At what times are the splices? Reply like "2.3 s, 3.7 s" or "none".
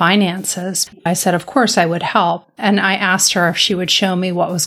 1.0 s